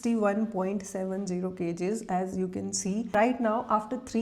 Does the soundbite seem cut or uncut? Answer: cut